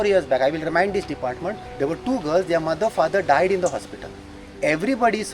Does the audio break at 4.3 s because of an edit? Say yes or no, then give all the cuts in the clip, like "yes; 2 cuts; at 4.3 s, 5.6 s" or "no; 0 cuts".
no; 1 cut; at 1.6 s